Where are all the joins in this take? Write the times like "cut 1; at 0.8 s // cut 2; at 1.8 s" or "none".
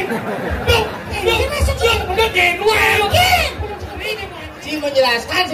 cut 1; at 4.1 s